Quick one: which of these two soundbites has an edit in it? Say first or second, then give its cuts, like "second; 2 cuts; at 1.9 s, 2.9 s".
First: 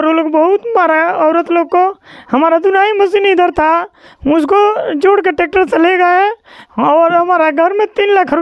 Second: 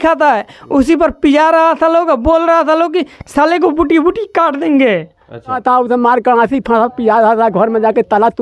second; 1 cut; at 5.6 s